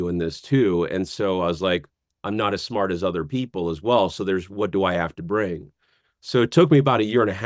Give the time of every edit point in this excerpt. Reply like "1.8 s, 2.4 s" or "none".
none